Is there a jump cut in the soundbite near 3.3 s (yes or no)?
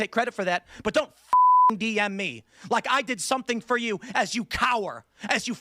no